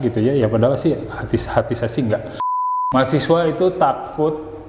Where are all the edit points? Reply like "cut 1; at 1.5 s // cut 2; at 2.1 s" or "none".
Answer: cut 1; at 2.7 s